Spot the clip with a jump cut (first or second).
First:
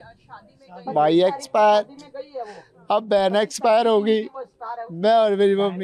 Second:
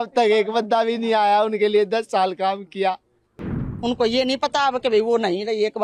second